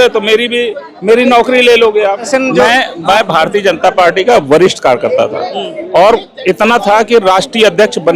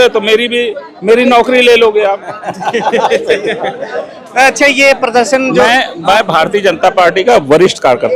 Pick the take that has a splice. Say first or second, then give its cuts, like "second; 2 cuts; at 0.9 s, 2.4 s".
first; 1 cut; at 2.3 s